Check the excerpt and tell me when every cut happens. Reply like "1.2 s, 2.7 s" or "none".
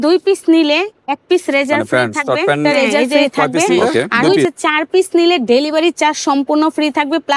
4.4 s